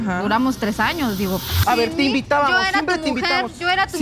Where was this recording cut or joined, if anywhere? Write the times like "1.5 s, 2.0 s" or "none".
1.5 s